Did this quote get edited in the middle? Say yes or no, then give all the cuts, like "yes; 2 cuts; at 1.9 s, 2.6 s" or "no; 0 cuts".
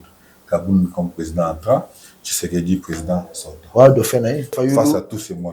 yes; 1 cut; at 4.5 s